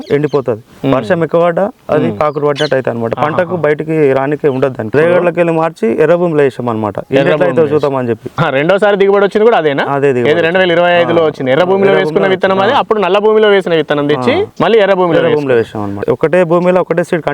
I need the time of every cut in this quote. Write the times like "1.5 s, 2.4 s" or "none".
4.9 s, 8.3 s, 16.0 s